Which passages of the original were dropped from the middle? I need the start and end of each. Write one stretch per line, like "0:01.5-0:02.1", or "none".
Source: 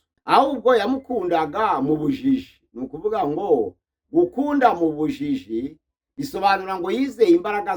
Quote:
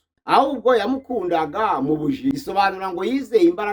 0:02.3-0:06.2